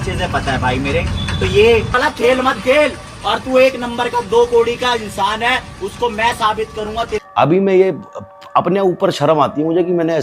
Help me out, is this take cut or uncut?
cut